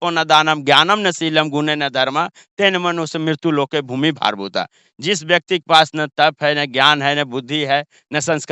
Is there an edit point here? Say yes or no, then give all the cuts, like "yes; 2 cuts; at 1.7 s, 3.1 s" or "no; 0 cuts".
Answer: no; 0 cuts